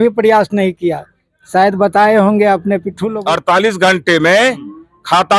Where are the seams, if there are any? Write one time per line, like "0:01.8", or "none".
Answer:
0:03.1